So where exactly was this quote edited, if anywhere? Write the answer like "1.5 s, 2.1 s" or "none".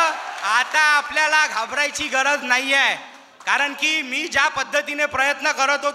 none